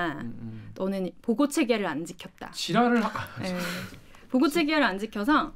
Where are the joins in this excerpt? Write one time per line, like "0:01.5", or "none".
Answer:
none

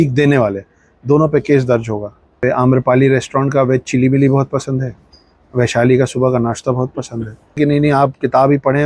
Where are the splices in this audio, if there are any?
0:02.3
0:07.6

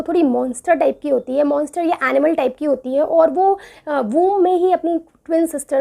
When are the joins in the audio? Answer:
none

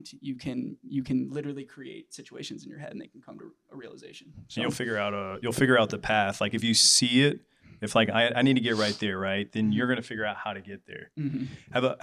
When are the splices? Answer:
none

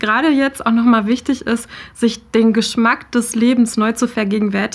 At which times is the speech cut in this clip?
none

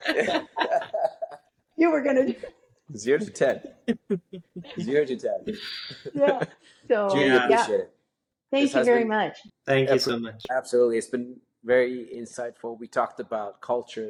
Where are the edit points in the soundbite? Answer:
none

